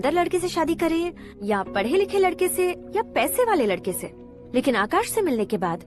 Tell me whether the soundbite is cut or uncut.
uncut